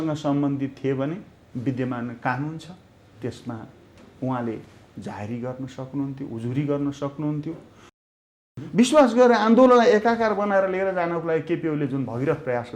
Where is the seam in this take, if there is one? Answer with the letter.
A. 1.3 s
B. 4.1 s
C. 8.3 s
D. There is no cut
C